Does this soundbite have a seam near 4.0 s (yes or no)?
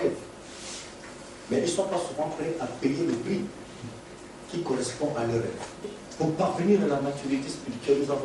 no